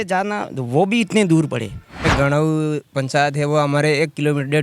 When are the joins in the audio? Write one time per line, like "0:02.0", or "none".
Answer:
0:02.1